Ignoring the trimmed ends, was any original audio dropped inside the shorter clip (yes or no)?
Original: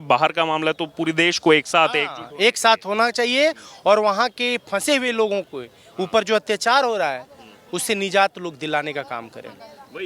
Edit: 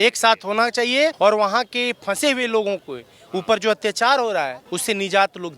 yes